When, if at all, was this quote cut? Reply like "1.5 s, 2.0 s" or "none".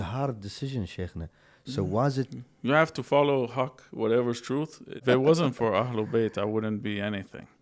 5.0 s